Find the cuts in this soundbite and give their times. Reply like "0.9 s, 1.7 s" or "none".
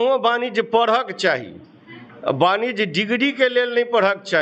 none